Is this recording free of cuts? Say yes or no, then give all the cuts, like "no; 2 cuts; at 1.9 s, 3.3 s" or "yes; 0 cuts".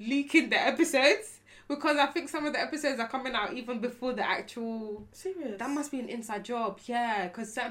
yes; 0 cuts